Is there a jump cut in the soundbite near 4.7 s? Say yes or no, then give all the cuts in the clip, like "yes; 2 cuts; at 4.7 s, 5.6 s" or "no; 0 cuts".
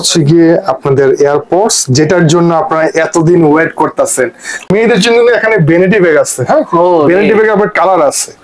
yes; 1 cut; at 4.7 s